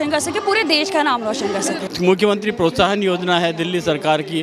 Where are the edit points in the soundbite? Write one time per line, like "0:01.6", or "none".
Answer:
0:01.9